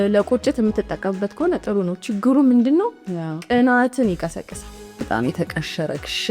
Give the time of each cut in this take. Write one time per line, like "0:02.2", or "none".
0:05.1